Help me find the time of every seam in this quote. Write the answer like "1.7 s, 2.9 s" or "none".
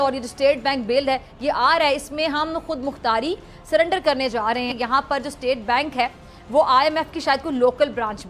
4.8 s